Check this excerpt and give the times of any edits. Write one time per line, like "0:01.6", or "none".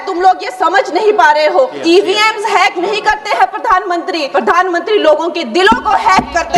0:01.8
0:04.3